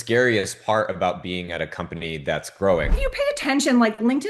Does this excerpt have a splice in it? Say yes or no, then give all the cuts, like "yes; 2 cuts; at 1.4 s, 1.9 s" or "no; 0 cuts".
yes; 1 cut; at 2.9 s